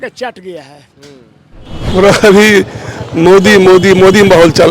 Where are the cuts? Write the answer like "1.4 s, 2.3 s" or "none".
1.7 s